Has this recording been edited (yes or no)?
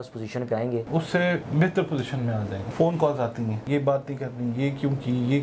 yes